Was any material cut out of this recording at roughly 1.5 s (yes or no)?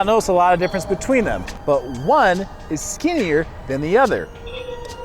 yes